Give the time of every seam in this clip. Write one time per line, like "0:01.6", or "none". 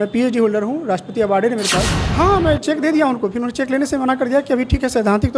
0:02.0